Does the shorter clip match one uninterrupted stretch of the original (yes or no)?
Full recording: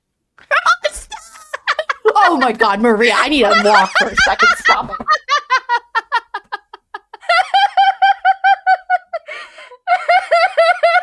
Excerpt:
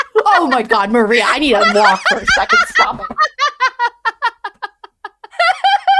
yes